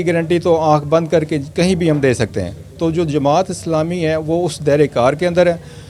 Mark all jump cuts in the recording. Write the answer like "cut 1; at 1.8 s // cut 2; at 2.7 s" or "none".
none

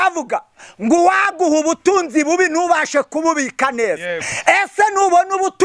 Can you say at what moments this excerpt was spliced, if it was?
none

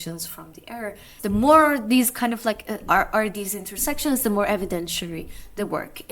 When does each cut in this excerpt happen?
cut 1; at 1.1 s

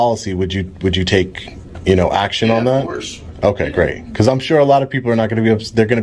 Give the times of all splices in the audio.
none

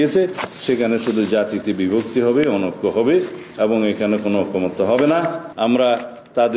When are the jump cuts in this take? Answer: cut 1; at 5.4 s

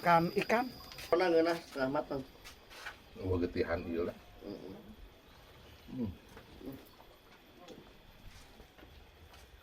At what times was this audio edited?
cut 1; at 1.1 s

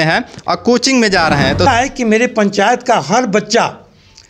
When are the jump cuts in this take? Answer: cut 1; at 1.7 s

